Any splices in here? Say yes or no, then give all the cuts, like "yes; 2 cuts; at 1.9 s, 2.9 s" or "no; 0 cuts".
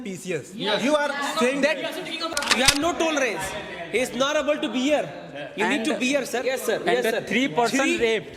yes; 2 cuts; at 2.3 s, 6.5 s